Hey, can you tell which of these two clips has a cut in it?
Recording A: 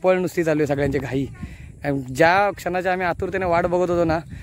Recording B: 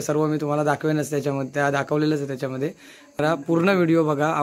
B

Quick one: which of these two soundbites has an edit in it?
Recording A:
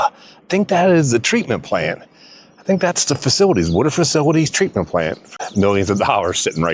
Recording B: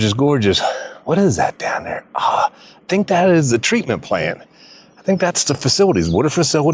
A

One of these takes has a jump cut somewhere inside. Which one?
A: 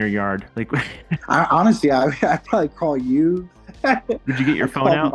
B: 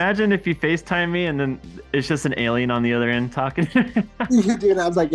A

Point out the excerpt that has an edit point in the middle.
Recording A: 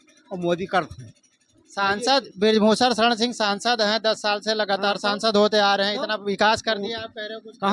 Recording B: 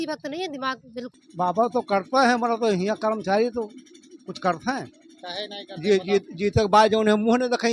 B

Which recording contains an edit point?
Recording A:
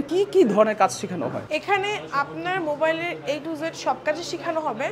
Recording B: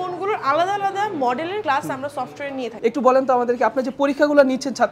B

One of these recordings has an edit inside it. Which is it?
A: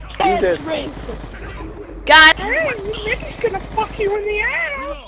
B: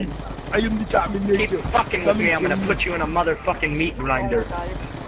A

